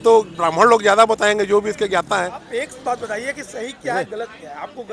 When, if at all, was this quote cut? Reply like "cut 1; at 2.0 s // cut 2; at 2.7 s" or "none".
cut 1; at 2.4 s